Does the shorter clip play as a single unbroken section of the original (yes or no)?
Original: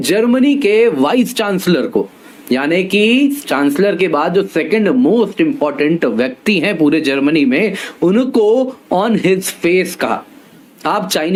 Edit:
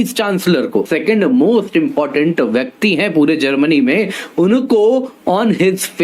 no